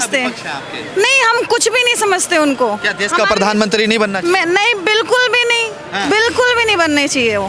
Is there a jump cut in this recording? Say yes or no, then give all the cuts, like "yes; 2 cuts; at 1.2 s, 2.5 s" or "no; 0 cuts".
no; 0 cuts